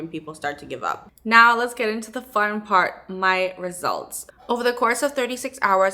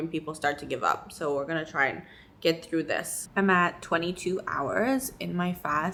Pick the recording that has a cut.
first; 2 cuts; at 1.1 s, 4.3 s

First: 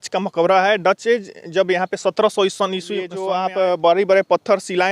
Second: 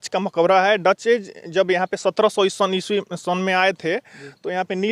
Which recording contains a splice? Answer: first; 1 cut; at 3.1 s

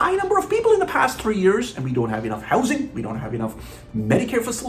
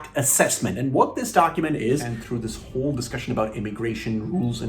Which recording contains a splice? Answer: second; 1 cut; at 2.2 s

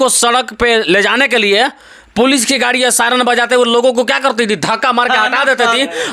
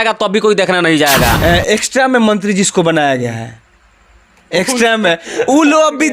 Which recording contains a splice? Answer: second; 1 cut; at 1.4 s

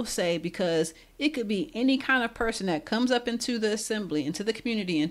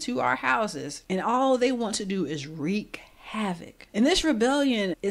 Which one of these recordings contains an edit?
second; 2 cuts; at 0.9 s, 3.7 s

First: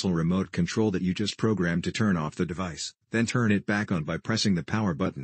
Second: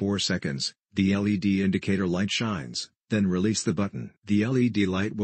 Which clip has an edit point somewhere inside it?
second; 1 cut; at 4.1 s

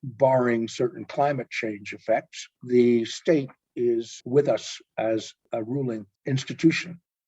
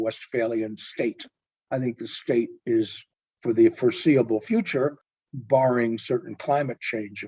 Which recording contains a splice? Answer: first; 2 cuts; at 4.2 s, 5.8 s

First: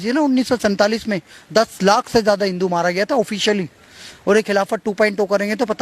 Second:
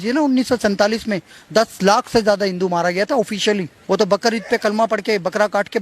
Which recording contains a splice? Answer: second; 1 cut; at 3.7 s

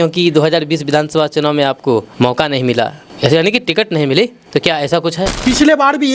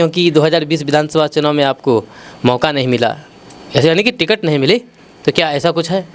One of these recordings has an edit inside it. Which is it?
first; 4 cuts; at 2.1 s, 3.0 s, 4.4 s, 5.3 s

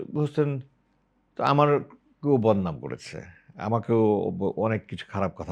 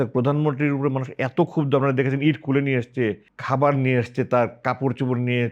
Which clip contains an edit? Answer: second; 1 cut; at 3.3 s

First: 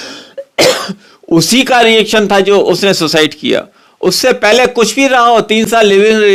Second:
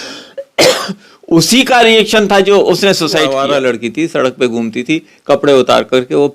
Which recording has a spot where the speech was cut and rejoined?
second; 1 cut; at 3.3 s

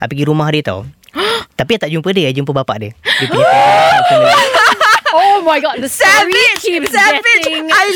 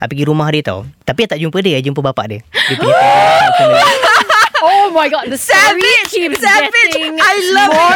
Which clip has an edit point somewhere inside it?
second; 1 cut; at 1.0 s

